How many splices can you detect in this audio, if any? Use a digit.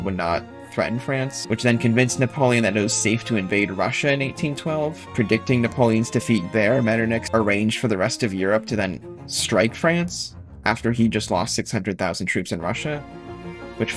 3